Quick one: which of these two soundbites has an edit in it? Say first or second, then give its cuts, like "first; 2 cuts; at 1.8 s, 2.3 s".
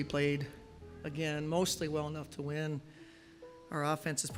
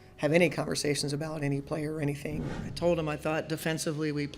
second; 1 cut; at 2.4 s